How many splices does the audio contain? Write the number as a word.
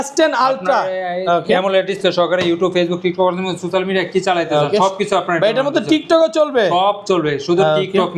zero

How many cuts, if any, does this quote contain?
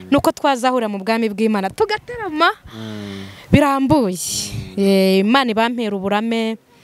zero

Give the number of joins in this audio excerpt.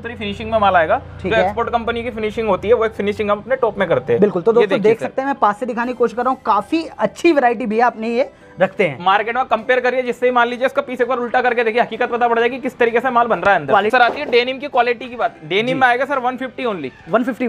one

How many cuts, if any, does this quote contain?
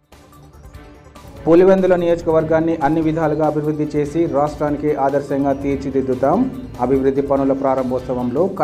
one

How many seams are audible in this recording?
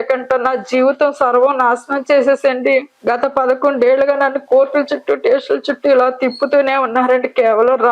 one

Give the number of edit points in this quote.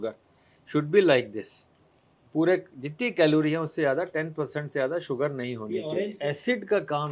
one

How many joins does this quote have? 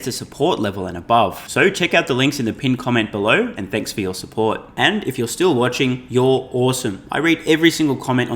zero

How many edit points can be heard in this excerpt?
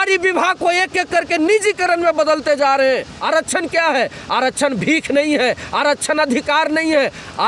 one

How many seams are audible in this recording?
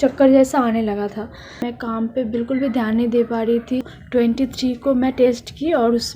two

